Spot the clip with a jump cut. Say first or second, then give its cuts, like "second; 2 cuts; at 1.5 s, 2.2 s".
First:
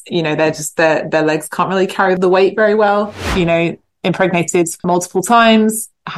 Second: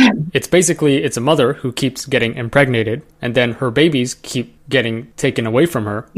first; 3 cuts; at 2.2 s, 3.2 s, 4.8 s